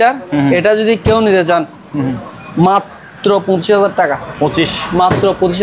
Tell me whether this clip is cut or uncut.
uncut